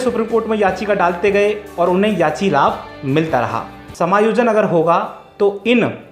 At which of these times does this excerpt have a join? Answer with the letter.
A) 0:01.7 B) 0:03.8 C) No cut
B